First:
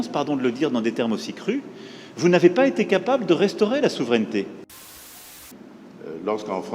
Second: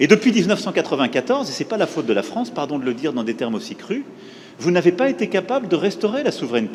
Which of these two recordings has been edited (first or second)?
first